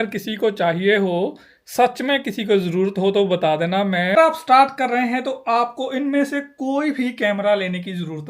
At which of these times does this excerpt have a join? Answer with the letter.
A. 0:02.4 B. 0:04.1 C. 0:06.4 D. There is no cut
B